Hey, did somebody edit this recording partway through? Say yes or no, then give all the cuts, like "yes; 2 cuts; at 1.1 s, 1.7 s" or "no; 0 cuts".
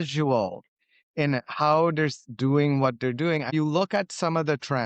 yes; 1 cut; at 3.5 s